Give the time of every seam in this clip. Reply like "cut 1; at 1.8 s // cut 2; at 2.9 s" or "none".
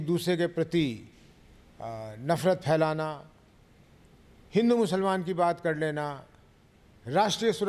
none